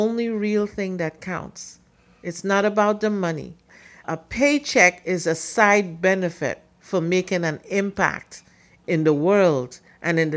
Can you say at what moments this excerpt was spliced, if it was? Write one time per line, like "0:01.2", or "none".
0:04.0
0:08.8